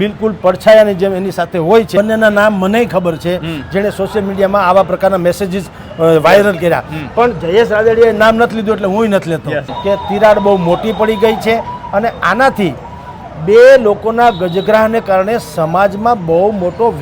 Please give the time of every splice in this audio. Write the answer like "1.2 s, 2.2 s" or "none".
1.9 s, 9.7 s